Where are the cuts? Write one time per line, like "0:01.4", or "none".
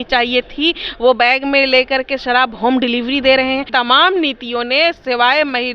0:03.7